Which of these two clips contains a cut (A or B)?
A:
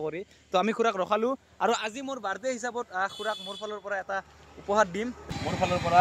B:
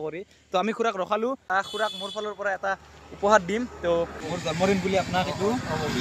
B